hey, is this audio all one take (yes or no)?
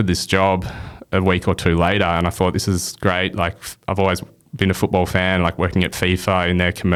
yes